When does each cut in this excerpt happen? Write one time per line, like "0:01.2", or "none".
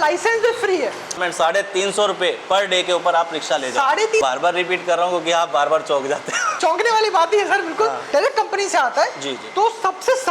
0:01.2
0:04.2
0:06.4
0:08.0

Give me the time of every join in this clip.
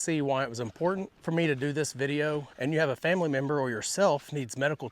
0:01.1
0:02.5

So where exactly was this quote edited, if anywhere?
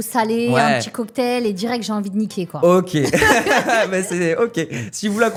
none

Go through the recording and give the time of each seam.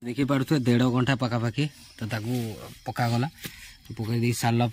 none

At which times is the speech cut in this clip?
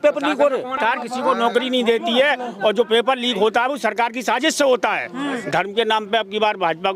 0:00.8
0:05.4

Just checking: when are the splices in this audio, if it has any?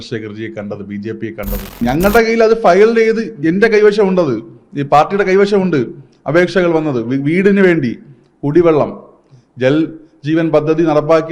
0:01.8

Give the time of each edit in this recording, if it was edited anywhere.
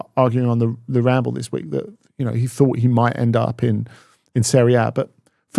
none

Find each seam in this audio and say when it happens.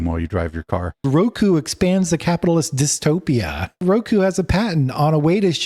0:01.1
0:03.8

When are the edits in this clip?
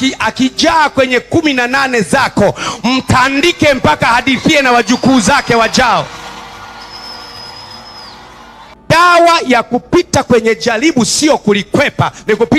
0:08.7

